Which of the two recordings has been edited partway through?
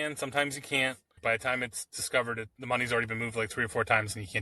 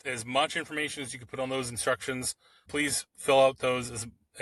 first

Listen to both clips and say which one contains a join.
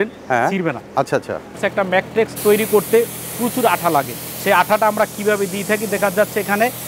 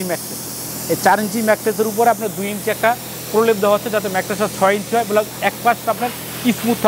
first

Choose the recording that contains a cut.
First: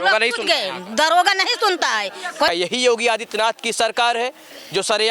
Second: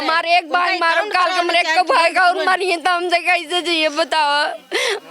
first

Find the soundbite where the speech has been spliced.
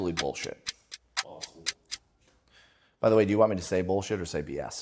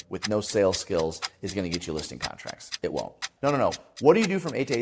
second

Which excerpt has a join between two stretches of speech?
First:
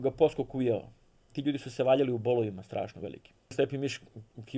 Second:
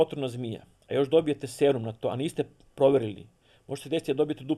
first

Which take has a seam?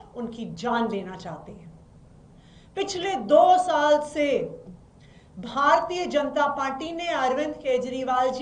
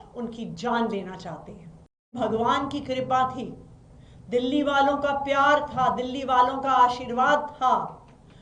second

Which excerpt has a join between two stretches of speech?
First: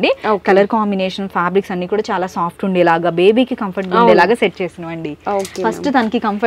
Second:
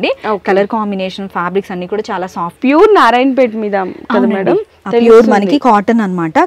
second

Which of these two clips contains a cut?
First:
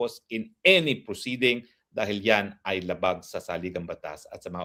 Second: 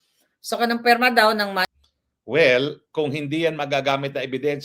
second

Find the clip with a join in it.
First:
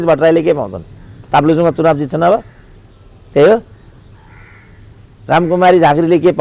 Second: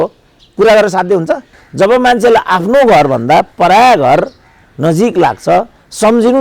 second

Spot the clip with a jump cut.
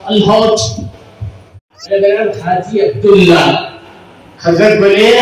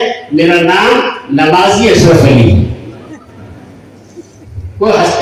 first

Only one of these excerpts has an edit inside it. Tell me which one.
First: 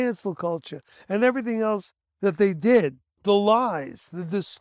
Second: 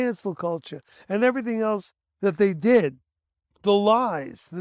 first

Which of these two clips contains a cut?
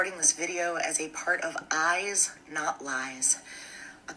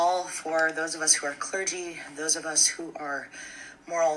second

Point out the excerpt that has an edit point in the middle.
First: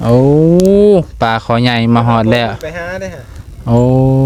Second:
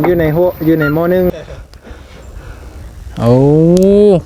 second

